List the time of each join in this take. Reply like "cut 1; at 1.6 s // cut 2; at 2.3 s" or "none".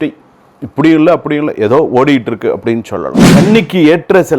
cut 1; at 3.2 s